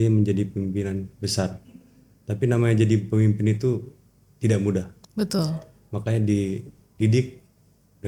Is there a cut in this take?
no; 0 cuts

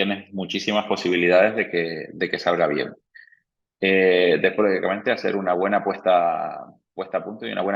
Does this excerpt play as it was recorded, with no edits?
yes; 0 cuts

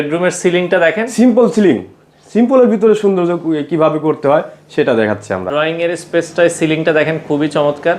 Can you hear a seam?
yes; 1 cut; at 5.4 s

